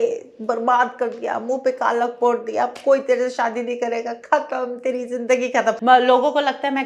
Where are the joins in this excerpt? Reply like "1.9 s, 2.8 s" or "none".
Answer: 5.8 s